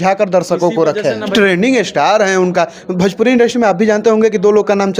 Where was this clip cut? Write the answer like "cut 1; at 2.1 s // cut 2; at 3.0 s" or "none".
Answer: cut 1; at 1.2 s

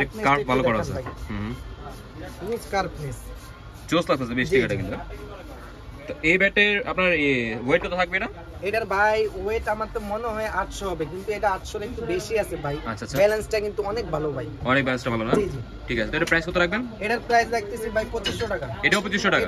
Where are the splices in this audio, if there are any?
none

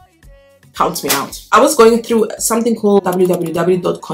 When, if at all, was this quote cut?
cut 1; at 1.5 s

